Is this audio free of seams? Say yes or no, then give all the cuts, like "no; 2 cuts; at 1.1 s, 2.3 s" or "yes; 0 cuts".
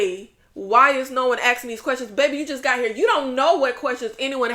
yes; 0 cuts